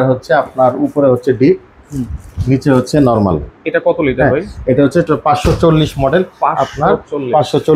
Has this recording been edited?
no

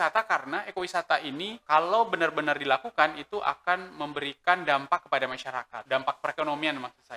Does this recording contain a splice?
yes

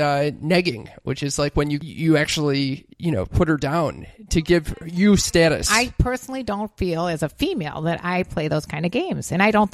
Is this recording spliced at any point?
yes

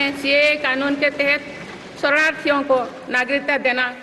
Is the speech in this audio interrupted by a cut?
no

